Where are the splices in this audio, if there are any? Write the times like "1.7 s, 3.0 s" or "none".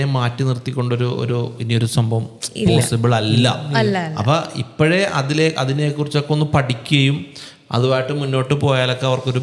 none